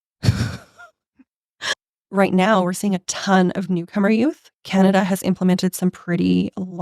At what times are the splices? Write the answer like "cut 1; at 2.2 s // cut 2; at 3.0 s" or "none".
cut 1; at 1.7 s